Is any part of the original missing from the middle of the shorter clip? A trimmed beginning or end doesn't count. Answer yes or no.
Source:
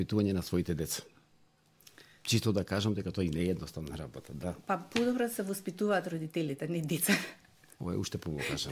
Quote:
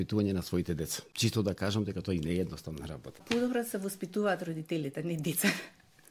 yes